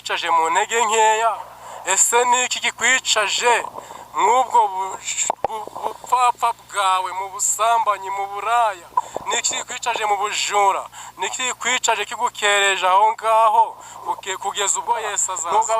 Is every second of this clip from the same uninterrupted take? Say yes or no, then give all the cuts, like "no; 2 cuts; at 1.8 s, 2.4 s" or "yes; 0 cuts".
no; 1 cut; at 14.8 s